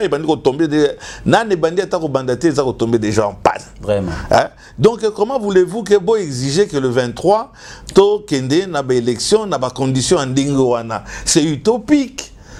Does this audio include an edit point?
no; 0 cuts

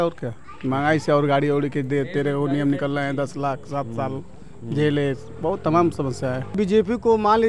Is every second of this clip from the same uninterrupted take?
no; 1 cut; at 6.6 s

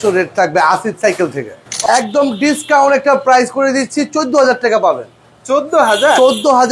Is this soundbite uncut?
no; 1 cut; at 1.7 s

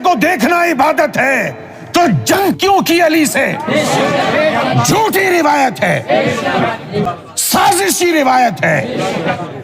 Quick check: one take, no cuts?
no; 1 cut; at 7.1 s

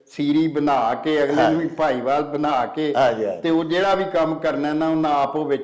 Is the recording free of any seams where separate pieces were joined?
yes; 0 cuts

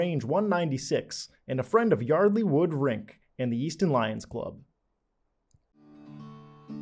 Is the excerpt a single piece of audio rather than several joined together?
no; 1 cut; at 5.5 s

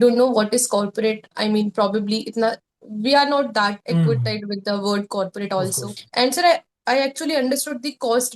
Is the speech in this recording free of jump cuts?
no; 1 cut; at 5.9 s

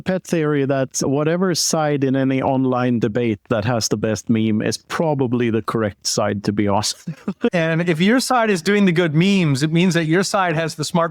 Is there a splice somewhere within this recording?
yes; 1 cut; at 7.5 s

